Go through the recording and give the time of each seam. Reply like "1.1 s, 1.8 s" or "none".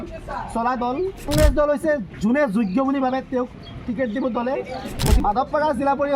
1.3 s, 5.2 s